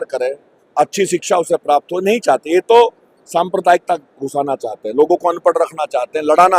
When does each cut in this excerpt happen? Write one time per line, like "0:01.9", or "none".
none

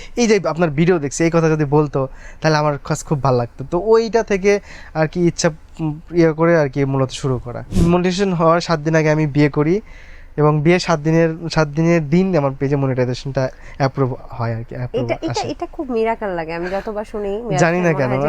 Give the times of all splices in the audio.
0:07.7

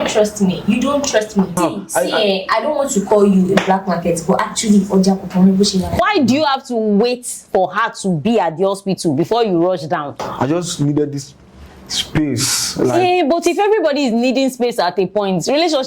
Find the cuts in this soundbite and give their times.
0:01.6
0:06.0
0:10.3

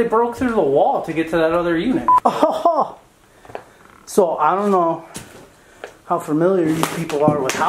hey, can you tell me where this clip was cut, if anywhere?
0:02.1

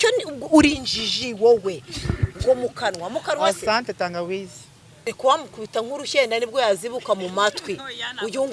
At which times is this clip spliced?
0:05.1

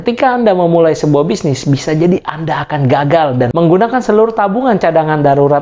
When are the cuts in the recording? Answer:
0:03.5

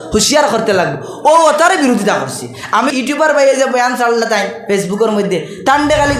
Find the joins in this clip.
0:02.9

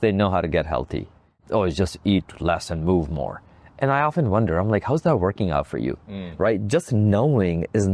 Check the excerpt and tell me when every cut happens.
0:01.4

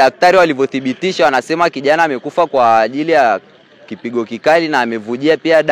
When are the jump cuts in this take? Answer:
none

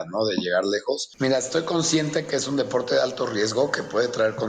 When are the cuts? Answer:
0:01.1

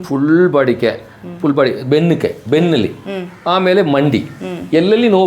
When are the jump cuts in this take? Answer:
none

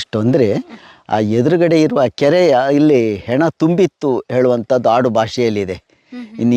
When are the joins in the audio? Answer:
none

